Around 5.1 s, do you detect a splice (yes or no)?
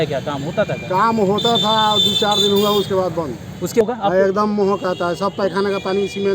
no